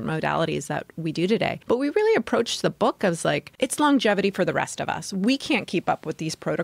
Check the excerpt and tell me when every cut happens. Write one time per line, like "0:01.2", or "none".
0:01.6
0:03.5